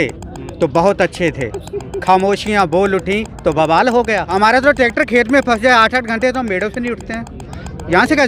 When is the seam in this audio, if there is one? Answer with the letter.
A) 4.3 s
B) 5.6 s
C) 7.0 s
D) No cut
A